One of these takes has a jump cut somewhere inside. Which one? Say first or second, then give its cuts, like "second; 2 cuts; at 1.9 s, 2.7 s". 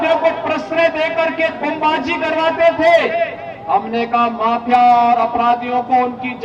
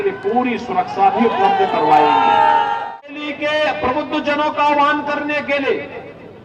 second; 1 cut; at 3.0 s